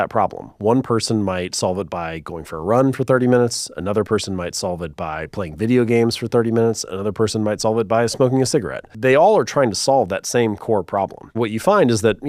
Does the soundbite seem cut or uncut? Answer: cut